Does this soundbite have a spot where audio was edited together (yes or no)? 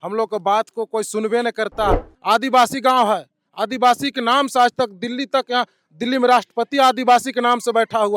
yes